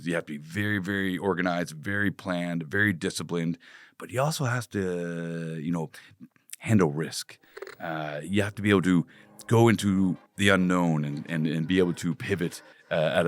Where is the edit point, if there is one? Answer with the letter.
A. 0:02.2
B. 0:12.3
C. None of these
C